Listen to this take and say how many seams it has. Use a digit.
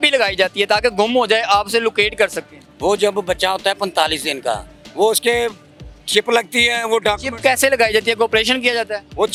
0